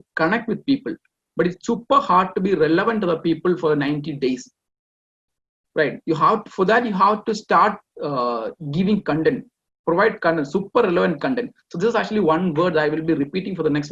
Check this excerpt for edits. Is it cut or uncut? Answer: uncut